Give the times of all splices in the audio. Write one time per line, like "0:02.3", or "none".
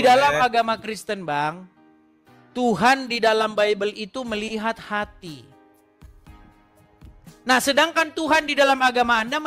0:06.0
0:07.4